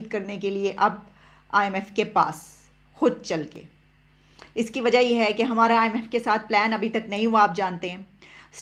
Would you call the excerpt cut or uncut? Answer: uncut